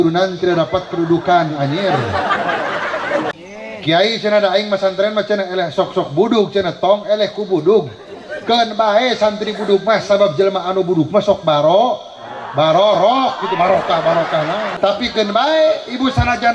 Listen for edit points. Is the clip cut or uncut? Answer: cut